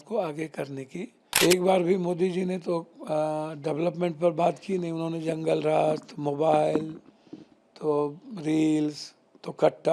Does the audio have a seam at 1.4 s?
yes; 1 cut; at 1.4 s

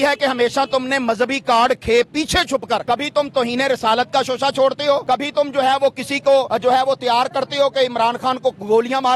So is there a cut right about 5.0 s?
yes; 3 cuts; at 2.8 s, 5.0 s, 6.5 s

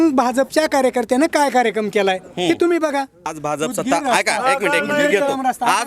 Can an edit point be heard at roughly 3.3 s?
yes; 1 cut; at 3.3 s

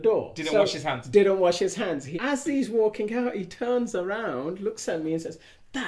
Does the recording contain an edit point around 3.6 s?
no; 1 cut; at 2.1 s

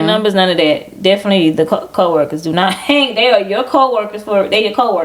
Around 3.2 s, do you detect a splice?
no; 0 cuts

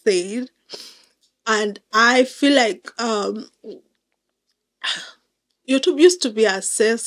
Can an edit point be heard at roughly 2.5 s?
no; 0 cuts

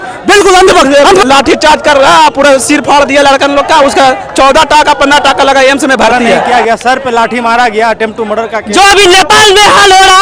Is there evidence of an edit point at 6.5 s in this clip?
yes; 3 cuts; at 1.0 s, 6.5 s, 8.6 s

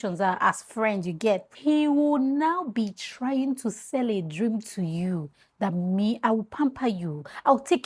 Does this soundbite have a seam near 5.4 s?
no; 1 cut; at 1.5 s

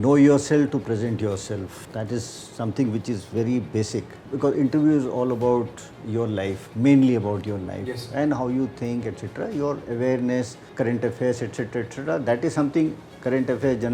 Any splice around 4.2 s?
yes; 3 cuts; at 1.8 s, 4.2 s, 10.6 s

